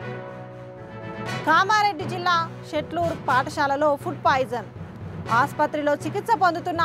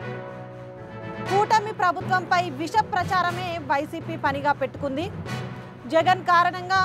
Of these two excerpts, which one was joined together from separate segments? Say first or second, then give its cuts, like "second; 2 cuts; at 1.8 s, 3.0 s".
second; 1 cut; at 1.2 s